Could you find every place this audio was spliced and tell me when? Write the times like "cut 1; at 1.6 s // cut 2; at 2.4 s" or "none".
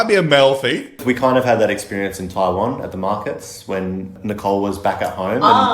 cut 1; at 1.0 s // cut 2; at 4.1 s